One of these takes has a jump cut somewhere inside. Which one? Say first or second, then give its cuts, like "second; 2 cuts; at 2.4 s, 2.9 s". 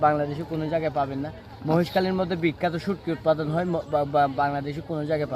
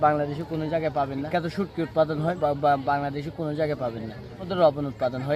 second; 3 cuts; at 1.3 s, 2.4 s, 4.5 s